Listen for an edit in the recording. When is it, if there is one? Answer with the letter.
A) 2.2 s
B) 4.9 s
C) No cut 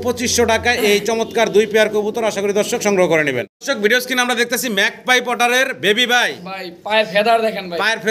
C